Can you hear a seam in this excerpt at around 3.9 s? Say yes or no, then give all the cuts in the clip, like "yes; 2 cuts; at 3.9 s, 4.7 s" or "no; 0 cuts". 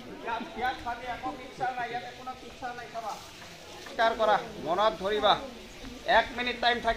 yes; 1 cut; at 3.9 s